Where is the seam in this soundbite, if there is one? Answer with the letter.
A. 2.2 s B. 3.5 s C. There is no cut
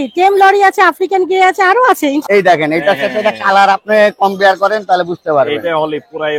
A